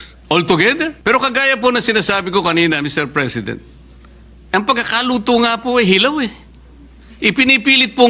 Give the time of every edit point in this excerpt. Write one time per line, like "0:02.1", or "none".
0:01.0